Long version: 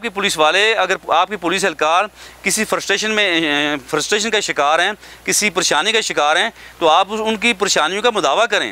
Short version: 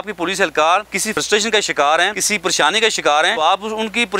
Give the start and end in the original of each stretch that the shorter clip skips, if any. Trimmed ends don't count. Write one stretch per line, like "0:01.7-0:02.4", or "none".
0:02.4-0:04.0
0:05.0-0:05.4
0:06.5-0:06.9